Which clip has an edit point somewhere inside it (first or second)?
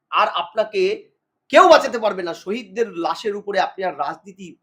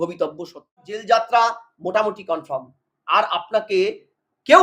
second